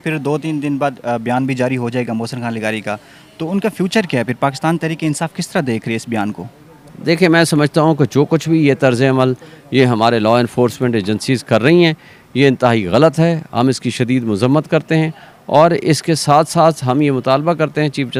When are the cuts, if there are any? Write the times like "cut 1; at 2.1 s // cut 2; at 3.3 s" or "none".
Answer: none